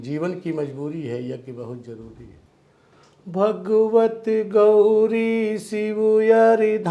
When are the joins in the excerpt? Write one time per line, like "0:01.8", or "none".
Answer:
0:02.3